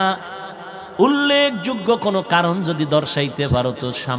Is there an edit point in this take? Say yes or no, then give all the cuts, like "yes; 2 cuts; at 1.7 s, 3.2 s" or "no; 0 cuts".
no; 0 cuts